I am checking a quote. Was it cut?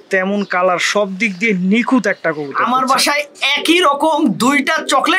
yes; 1 cut; at 2.5 s

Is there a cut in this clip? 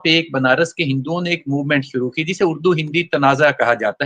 no; 0 cuts

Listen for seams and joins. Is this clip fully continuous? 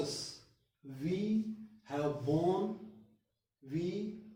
yes; 0 cuts

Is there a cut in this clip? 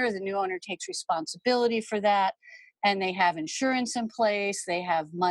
no; 0 cuts

